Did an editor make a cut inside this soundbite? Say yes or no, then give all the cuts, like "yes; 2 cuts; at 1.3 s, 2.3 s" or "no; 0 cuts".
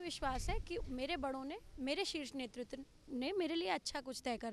no; 0 cuts